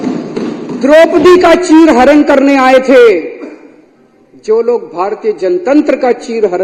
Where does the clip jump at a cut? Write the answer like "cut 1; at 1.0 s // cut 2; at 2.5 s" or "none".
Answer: none